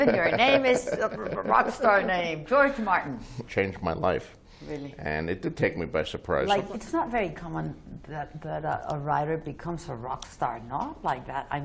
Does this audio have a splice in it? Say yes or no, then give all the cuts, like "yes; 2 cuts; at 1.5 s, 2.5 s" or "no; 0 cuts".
yes; 2 cuts; at 3.4 s, 6.5 s